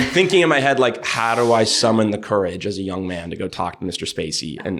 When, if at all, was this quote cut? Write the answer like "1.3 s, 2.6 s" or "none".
none